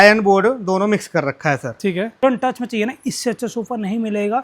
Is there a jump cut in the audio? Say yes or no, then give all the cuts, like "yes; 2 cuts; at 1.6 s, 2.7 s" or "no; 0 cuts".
yes; 1 cut; at 2.2 s